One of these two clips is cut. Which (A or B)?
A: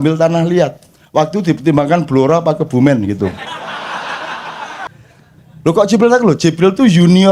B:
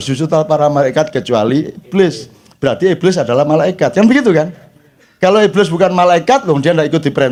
A